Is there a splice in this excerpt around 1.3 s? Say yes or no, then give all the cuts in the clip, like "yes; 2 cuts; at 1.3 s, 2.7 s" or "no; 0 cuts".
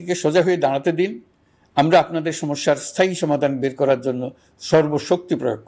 no; 0 cuts